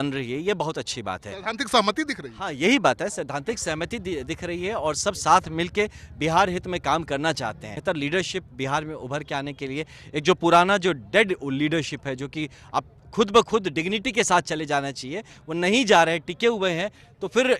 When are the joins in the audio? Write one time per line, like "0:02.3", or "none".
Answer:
0:07.7